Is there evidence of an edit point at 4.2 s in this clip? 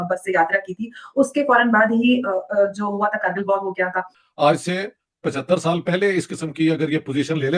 yes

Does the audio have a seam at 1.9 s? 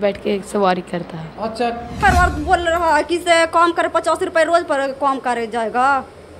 yes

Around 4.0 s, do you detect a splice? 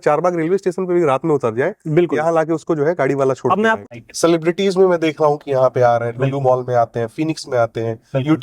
yes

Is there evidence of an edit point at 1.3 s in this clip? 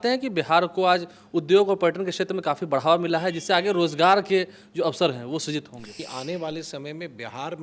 no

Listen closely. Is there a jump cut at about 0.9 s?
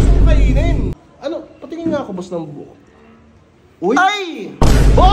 yes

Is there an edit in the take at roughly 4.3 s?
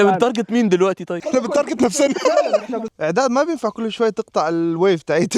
no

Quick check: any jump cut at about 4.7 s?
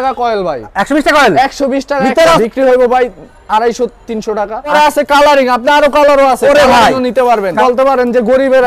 yes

